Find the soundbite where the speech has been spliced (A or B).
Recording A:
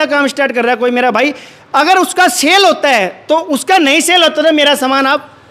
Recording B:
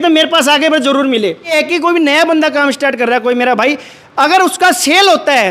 B